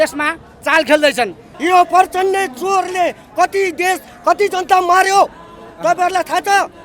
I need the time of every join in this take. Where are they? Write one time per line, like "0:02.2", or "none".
0:01.5